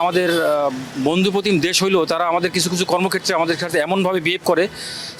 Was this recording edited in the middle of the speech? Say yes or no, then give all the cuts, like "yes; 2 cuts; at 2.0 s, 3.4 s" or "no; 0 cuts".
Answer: no; 0 cuts